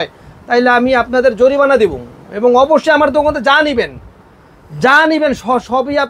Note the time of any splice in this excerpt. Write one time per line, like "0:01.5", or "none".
none